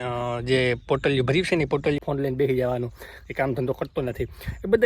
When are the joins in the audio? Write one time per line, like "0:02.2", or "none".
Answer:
0:02.0